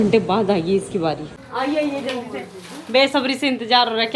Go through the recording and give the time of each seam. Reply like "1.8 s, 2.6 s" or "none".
1.4 s